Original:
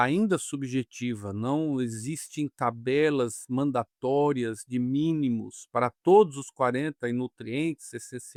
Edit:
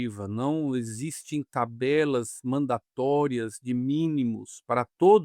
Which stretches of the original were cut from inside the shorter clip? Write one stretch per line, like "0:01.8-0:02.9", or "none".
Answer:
none